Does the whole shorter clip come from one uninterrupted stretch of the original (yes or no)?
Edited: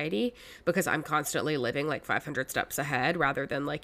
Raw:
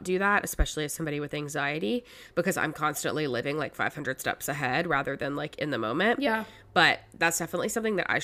yes